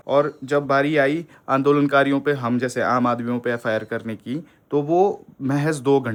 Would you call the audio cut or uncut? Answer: uncut